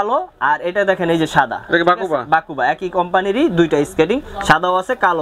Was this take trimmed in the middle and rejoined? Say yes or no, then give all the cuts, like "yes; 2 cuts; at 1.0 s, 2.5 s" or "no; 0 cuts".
no; 0 cuts